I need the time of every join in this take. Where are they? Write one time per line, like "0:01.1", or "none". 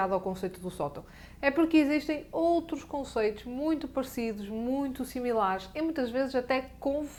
none